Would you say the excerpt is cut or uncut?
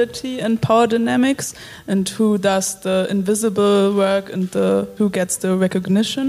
cut